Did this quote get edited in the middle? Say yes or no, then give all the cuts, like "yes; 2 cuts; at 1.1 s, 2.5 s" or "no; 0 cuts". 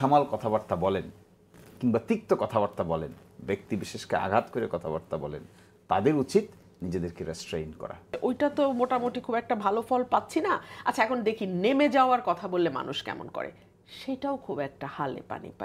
yes; 1 cut; at 8.1 s